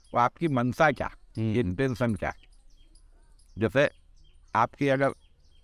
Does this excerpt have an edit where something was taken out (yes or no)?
no